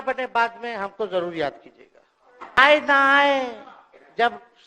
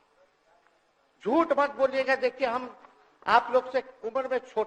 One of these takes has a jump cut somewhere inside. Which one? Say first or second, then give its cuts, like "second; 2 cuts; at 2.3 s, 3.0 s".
first; 1 cut; at 2.6 s